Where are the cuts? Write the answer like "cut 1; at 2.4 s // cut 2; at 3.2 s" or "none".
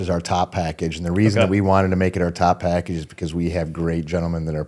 none